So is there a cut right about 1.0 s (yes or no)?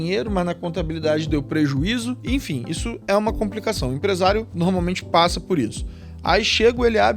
no